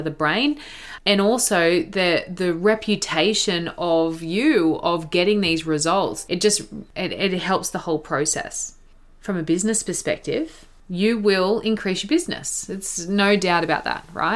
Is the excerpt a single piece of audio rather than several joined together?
no; 1 cut; at 8.7 s

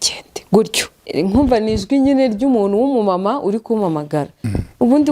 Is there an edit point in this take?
yes; 1 cut; at 1.1 s

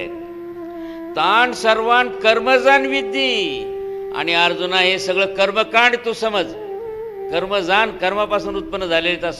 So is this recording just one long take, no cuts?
yes; 0 cuts

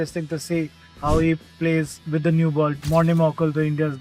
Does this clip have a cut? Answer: yes; 1 cut; at 2.8 s

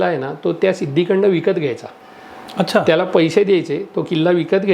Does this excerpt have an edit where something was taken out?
no; 0 cuts

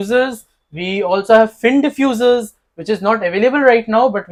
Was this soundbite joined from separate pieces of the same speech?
no; 0 cuts

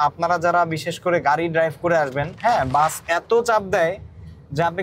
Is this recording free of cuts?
no; 1 cut; at 2.3 s

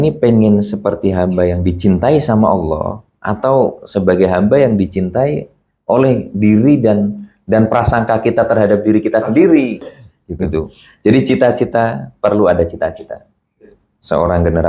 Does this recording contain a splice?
yes; 1 cut; at 10.8 s

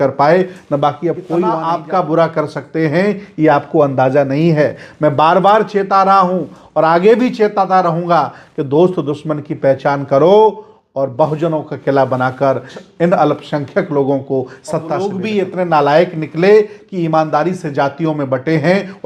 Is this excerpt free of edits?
no; 3 cuts; at 1.6 s, 12.8 s, 15.0 s

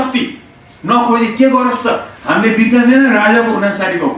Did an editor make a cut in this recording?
yes; 1 cut; at 2.1 s

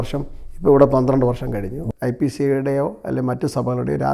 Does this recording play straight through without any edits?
no; 1 cut; at 1.8 s

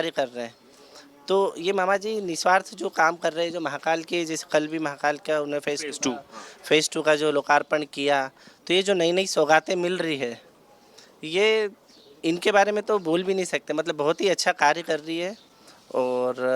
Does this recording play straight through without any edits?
yes; 0 cuts

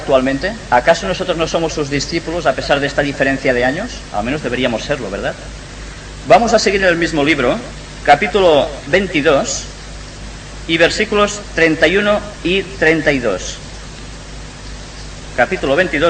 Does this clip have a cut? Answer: no; 0 cuts

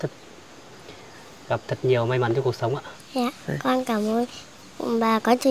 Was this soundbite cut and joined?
yes; 1 cut; at 3.0 s

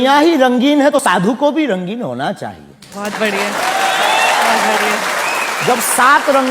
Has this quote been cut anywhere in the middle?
yes; 1 cut; at 1.0 s

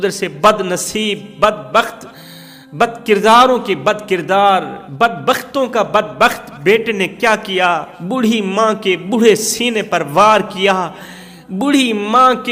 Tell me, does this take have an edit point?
no; 0 cuts

